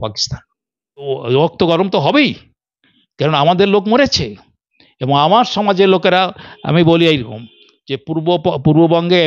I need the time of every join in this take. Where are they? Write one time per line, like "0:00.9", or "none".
0:01.1